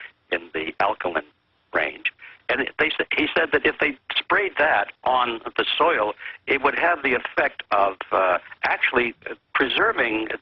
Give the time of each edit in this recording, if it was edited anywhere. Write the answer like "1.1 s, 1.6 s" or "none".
none